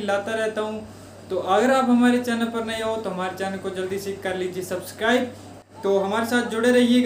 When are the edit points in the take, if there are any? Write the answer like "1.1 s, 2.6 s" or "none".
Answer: 5.5 s